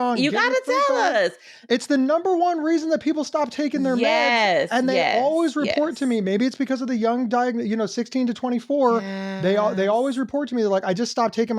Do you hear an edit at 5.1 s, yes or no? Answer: no